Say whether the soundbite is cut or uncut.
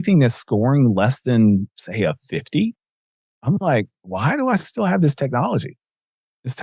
uncut